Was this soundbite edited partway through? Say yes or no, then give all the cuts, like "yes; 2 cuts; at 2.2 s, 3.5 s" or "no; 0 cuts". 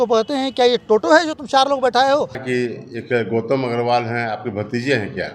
yes; 1 cut; at 2.4 s